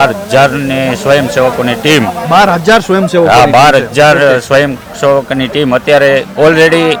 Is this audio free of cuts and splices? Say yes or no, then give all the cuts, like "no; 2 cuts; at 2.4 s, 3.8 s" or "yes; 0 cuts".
yes; 0 cuts